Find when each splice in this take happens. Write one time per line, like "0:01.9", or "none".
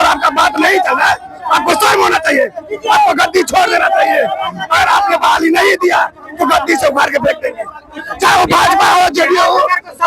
none